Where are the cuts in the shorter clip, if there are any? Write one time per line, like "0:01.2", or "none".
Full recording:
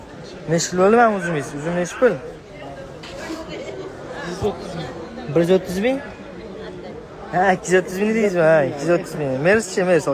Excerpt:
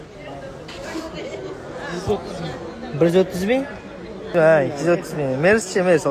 0:04.3